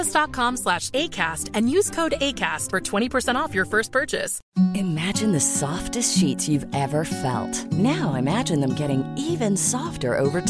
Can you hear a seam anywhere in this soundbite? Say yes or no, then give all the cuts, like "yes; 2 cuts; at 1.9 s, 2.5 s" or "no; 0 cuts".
yes; 1 cut; at 4.4 s